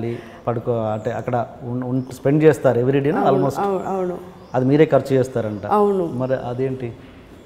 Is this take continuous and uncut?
yes; 0 cuts

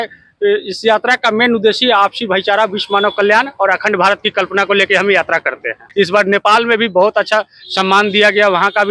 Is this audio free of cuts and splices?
no; 1 cut; at 5.8 s

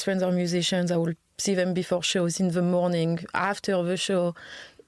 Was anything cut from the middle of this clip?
no; 0 cuts

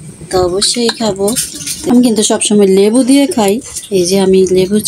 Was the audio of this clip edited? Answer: yes; 1 cut; at 1.7 s

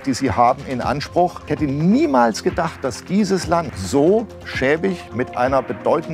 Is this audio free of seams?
no; 2 cuts; at 1.5 s, 3.8 s

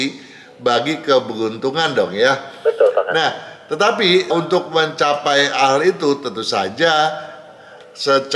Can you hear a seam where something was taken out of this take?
no; 0 cuts

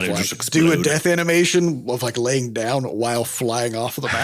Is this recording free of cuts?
yes; 0 cuts

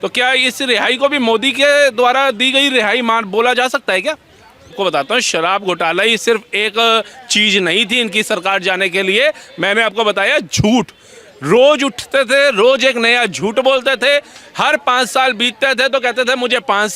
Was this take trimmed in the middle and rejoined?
yes; 1 cut; at 4.7 s

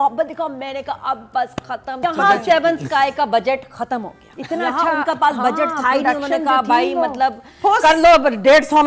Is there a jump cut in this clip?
yes; 1 cut; at 2.0 s

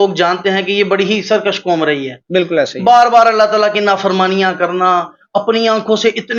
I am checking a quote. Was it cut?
no; 0 cuts

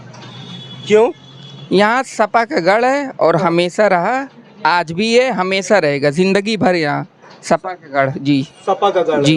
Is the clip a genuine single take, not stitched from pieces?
yes; 0 cuts

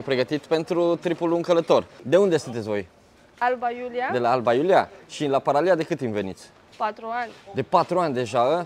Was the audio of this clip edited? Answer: yes; 1 cut; at 2.0 s

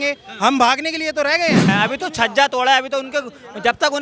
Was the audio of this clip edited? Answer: yes; 1 cut; at 1.6 s

